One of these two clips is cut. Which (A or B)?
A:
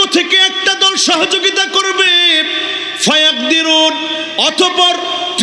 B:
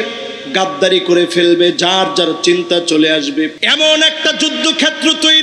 B